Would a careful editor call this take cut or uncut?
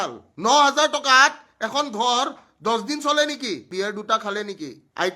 cut